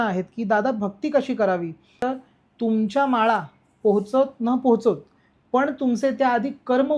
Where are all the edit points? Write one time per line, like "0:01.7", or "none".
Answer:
0:02.0